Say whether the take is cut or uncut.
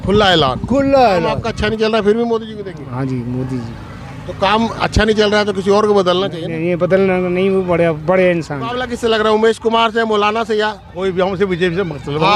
cut